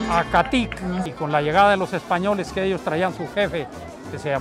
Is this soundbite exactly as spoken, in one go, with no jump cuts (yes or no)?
no